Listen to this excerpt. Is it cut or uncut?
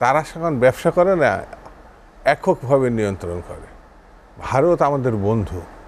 uncut